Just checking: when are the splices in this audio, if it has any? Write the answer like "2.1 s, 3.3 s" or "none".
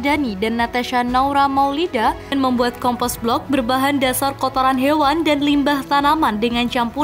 2.3 s